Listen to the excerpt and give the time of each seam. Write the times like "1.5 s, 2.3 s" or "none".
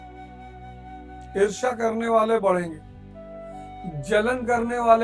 none